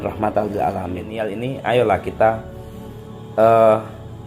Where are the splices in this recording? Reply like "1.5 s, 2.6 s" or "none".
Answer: 1.3 s